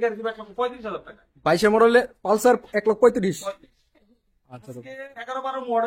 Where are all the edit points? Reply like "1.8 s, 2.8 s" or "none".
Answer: none